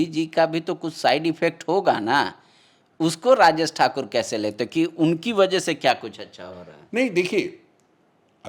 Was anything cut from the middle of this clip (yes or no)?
no